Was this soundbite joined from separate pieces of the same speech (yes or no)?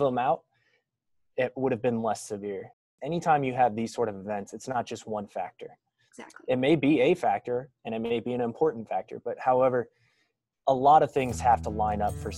yes